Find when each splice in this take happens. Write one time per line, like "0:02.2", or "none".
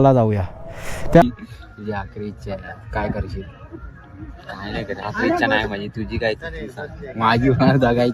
0:01.2